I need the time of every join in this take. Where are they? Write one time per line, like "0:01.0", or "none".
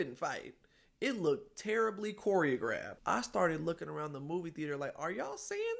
0:03.0